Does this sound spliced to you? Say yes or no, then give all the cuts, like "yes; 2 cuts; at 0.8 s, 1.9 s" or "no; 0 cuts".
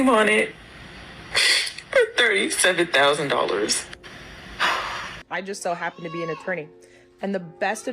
yes; 1 cut; at 5.2 s